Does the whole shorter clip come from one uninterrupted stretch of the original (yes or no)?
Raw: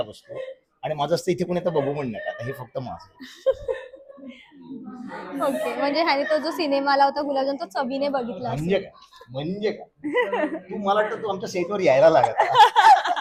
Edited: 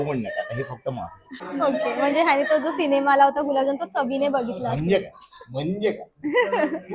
no